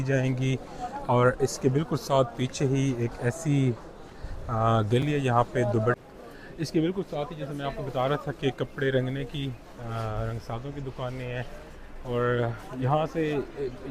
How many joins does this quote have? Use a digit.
0